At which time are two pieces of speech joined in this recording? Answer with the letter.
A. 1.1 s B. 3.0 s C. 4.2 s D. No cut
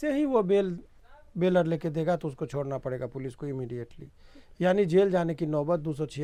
D